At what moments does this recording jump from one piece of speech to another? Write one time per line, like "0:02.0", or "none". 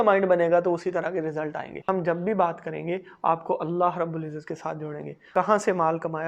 0:01.8
0:05.2